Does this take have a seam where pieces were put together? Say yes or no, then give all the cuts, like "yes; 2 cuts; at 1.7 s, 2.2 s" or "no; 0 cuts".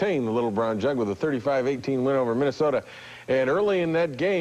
no; 0 cuts